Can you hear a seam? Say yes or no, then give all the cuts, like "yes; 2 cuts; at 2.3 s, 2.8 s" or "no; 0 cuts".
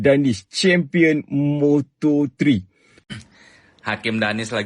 yes; 1 cut; at 2.9 s